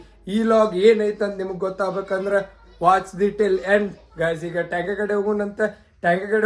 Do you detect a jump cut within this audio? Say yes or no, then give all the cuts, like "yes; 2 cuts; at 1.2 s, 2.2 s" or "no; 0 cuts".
no; 0 cuts